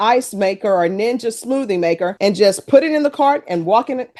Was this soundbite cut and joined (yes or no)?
no